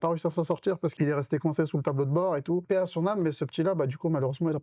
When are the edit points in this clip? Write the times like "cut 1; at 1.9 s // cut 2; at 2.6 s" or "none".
cut 1; at 0.9 s // cut 2; at 2.6 s